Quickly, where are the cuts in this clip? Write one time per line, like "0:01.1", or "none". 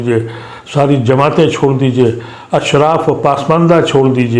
none